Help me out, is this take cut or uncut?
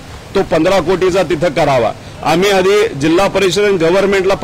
cut